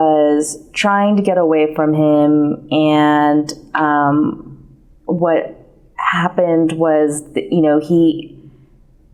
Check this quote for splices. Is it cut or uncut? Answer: uncut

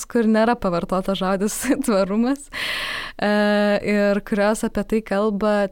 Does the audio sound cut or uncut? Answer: uncut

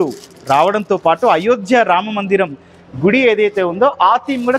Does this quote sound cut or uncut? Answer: uncut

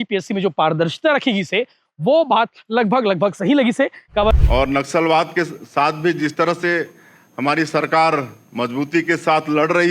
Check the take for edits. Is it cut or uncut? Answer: cut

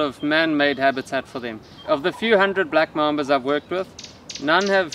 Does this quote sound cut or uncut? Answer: cut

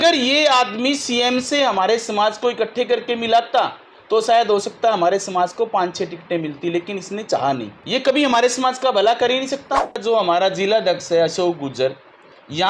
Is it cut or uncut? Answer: cut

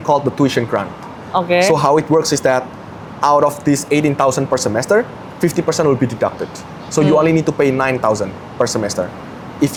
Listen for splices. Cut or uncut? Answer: uncut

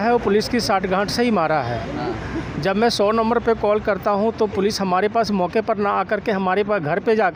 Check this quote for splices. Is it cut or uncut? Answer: uncut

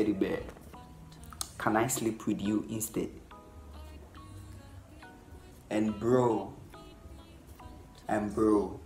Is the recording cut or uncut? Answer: uncut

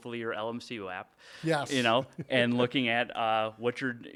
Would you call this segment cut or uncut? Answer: uncut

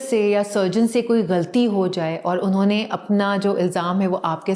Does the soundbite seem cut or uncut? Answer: uncut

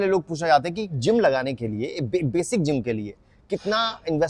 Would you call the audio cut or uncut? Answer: uncut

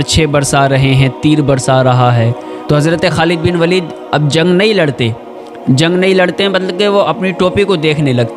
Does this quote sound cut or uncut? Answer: cut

